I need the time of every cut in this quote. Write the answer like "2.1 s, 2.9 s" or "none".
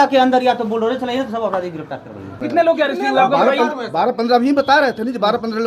2.4 s